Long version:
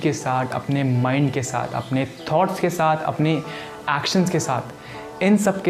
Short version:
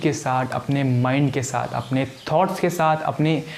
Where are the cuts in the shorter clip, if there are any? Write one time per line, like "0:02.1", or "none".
none